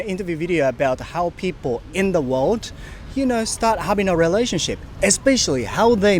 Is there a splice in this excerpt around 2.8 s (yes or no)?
no